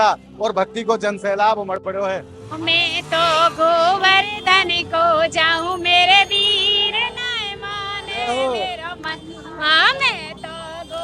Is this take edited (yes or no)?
yes